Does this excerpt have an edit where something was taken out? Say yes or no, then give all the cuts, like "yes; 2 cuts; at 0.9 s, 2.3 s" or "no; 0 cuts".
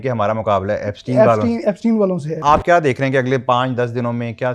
yes; 1 cut; at 2.4 s